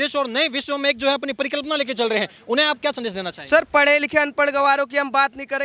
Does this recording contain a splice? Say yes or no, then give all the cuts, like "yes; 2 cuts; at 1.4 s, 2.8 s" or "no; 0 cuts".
no; 0 cuts